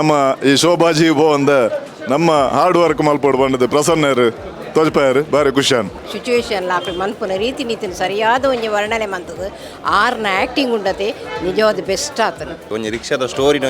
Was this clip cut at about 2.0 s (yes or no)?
no